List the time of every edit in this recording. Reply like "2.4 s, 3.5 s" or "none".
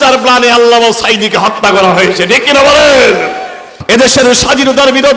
3.7 s